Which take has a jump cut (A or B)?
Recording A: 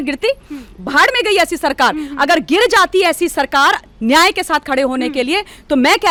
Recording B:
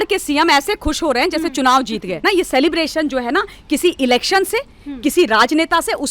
B